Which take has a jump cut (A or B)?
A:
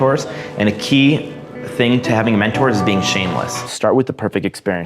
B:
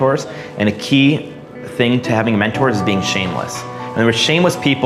A